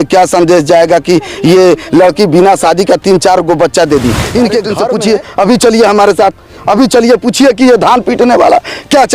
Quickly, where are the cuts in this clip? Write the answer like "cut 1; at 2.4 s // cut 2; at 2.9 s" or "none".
cut 1; at 4.8 s

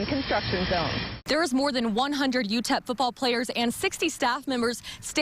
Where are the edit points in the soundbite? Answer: cut 1; at 1.1 s

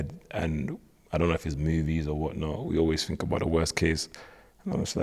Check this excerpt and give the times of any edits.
none

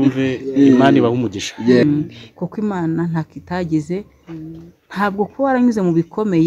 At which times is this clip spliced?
cut 1; at 1.8 s

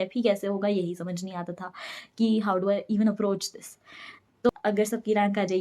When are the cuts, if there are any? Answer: cut 1; at 4.5 s

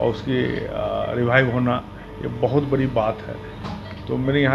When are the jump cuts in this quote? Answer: none

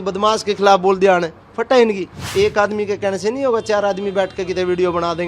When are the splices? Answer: cut 1; at 2.2 s

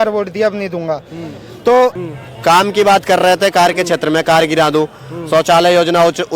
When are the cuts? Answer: cut 1; at 2.0 s

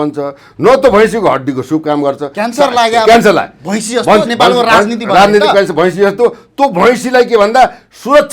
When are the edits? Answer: none

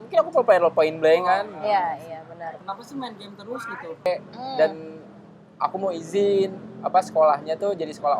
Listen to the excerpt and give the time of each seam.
cut 1; at 2.6 s // cut 2; at 4.1 s

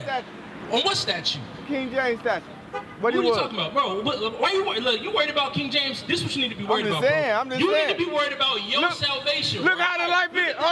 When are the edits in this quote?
none

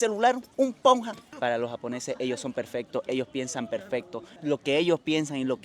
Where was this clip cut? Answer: cut 1; at 1.2 s

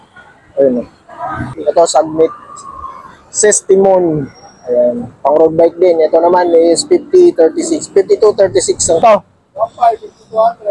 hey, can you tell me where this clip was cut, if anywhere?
cut 1; at 1.5 s // cut 2; at 9.0 s

